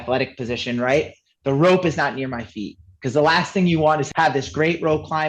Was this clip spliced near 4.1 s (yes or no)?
yes